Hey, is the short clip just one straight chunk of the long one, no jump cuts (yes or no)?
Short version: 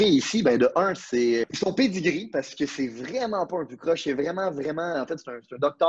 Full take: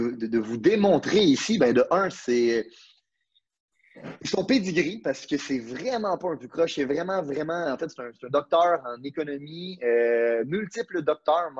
no